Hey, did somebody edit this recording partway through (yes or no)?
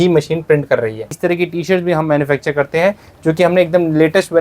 yes